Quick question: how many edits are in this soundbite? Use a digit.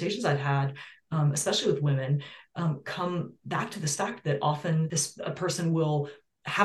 1